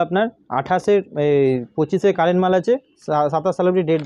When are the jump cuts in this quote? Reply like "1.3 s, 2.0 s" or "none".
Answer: none